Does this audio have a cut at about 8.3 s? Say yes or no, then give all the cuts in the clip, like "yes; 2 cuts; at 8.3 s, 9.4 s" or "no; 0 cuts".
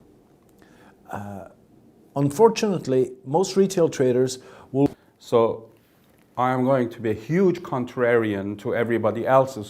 no; 1 cut; at 4.9 s